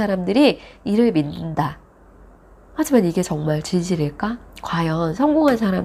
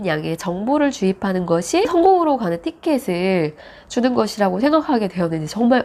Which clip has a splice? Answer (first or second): second